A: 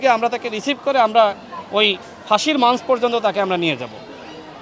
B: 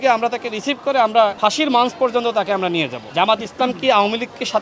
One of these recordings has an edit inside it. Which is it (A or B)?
B